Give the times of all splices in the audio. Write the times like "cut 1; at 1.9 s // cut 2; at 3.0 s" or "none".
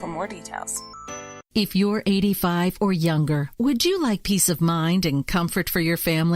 cut 1; at 1.4 s